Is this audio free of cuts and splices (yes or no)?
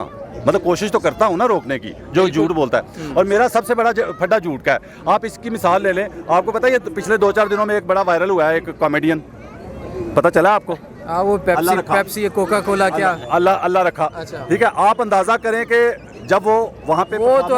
yes